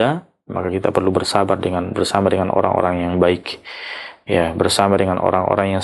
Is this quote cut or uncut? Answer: uncut